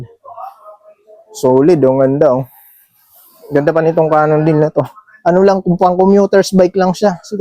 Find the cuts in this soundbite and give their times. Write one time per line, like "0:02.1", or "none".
none